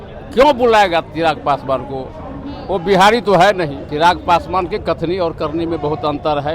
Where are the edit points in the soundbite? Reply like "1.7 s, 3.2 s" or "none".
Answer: 3.8 s